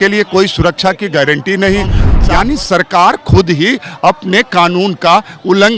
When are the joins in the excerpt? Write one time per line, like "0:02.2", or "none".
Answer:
0:02.1